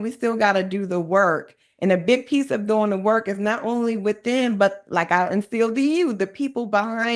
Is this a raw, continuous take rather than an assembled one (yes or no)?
yes